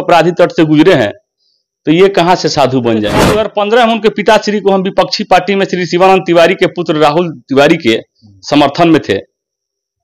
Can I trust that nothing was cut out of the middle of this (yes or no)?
no